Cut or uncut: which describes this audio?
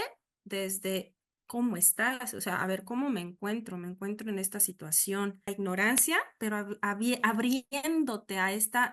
cut